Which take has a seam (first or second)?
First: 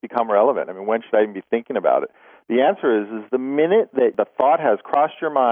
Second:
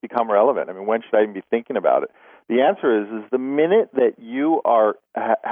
first